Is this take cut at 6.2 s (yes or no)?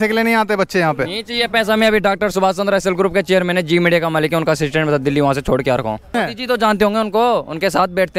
yes